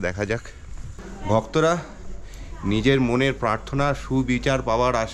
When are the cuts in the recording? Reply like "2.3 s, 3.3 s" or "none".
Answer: 1.1 s